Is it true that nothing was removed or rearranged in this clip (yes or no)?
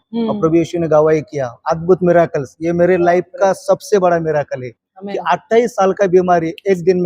yes